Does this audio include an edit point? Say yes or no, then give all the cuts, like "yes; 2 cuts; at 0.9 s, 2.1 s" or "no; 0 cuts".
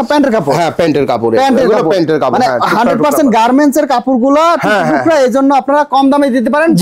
no; 0 cuts